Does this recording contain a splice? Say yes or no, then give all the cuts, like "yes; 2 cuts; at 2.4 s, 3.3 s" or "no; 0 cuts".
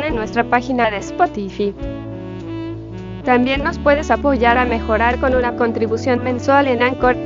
no; 0 cuts